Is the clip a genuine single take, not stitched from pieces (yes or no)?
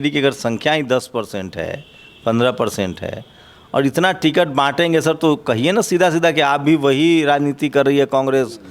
yes